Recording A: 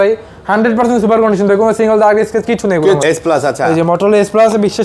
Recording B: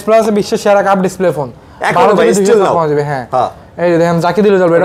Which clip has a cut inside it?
A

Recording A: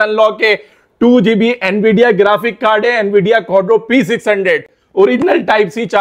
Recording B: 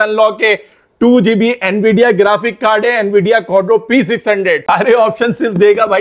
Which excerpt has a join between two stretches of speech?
B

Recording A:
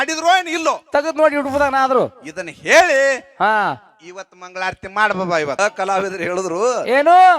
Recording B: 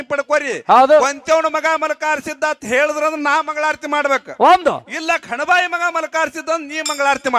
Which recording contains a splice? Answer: A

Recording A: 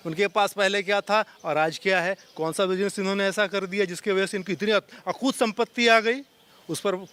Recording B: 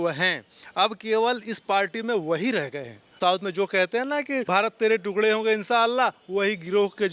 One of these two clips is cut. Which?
B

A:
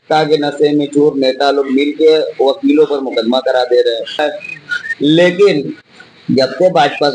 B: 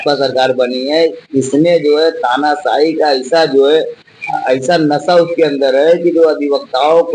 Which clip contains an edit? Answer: A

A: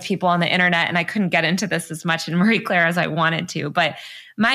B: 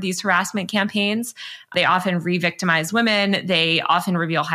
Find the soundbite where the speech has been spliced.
B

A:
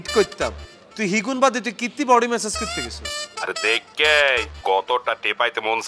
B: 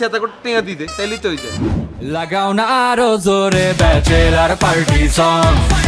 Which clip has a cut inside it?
B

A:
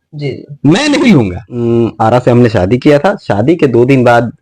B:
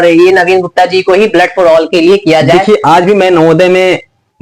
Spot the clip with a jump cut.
A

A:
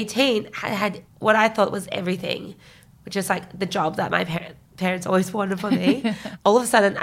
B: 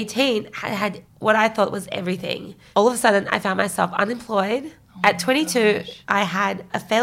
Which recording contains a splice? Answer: B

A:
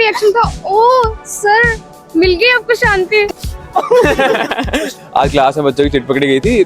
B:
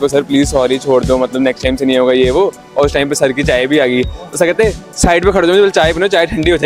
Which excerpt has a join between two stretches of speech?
A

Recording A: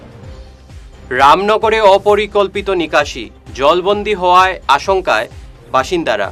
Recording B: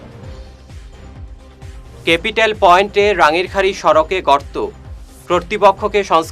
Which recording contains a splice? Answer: B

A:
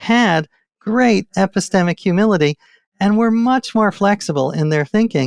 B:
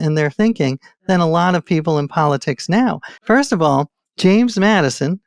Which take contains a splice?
B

